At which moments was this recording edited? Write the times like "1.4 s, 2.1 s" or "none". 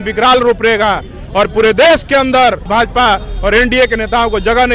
2.7 s